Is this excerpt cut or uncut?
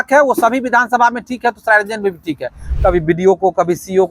cut